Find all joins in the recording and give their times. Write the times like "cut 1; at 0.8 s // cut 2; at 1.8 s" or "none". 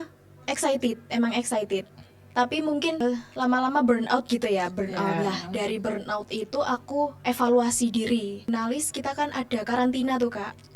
cut 1; at 3.0 s // cut 2; at 8.5 s